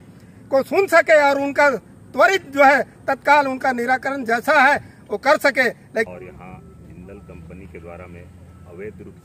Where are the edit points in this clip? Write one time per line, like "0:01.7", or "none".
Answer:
0:06.1